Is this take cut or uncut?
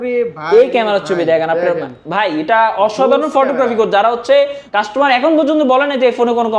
cut